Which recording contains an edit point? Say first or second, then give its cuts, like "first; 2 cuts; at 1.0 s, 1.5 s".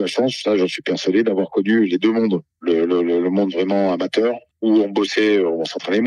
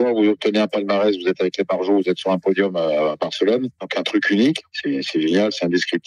second; 1 cut; at 4.7 s